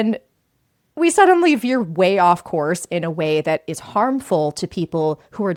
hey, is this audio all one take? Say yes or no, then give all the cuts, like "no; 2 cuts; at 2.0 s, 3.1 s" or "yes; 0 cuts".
yes; 0 cuts